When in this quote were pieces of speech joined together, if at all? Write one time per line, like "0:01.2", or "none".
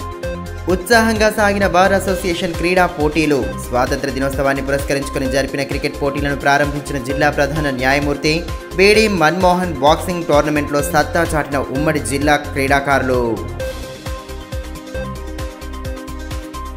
none